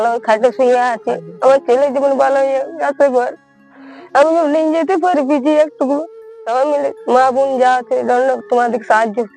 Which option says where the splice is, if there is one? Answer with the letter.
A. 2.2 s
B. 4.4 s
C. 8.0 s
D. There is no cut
D